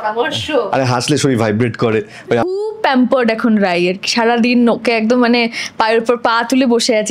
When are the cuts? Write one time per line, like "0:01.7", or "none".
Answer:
0:02.5